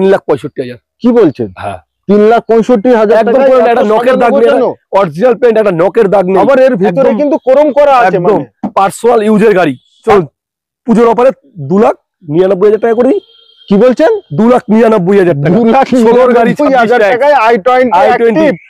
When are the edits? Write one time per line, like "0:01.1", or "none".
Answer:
0:10.0